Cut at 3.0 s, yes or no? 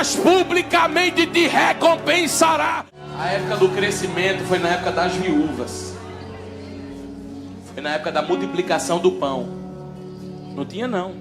yes